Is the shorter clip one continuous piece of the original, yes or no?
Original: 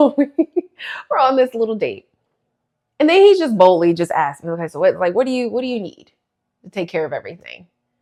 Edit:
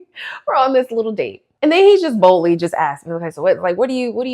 no